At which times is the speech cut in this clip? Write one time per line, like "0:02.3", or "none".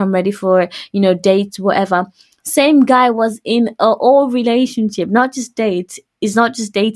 none